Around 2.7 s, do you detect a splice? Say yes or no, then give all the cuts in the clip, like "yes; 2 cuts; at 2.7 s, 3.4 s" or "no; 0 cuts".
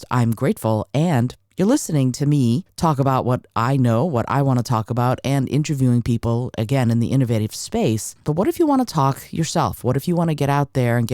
yes; 2 cuts; at 2.7 s, 8.2 s